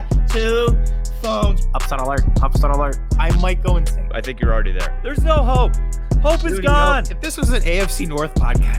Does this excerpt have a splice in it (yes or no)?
no